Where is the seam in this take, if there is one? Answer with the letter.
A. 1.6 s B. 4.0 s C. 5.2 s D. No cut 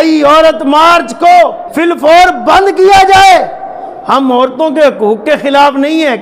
A